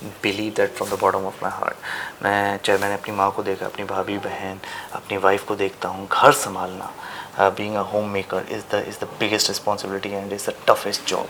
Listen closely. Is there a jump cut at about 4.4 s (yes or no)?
no